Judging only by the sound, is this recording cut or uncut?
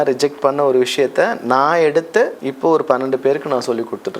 cut